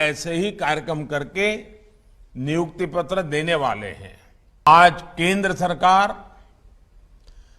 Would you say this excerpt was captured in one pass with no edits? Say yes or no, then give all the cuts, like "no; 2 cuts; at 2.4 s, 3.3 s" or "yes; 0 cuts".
no; 1 cut; at 4.7 s